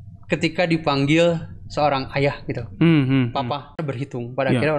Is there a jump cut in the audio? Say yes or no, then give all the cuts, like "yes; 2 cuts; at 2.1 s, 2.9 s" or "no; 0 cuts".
yes; 1 cut; at 3.8 s